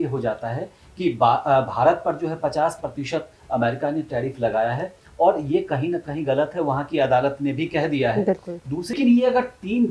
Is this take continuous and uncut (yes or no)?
no